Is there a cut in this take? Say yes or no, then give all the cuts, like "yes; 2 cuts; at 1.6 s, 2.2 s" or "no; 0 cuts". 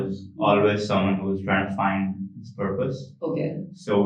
no; 0 cuts